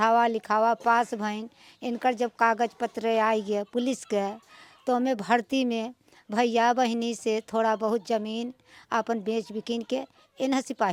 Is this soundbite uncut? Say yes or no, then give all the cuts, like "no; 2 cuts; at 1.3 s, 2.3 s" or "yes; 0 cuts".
yes; 0 cuts